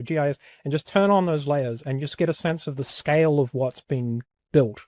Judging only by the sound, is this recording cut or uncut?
uncut